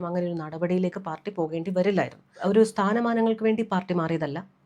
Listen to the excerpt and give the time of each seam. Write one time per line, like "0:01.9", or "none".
0:02.3